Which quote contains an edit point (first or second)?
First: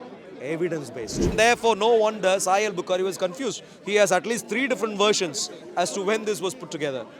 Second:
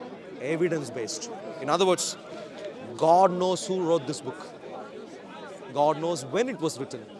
first